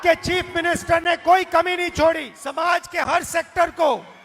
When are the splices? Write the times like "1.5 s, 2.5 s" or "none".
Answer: 2.4 s